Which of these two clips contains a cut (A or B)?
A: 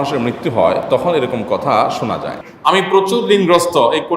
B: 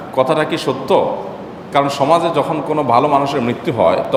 A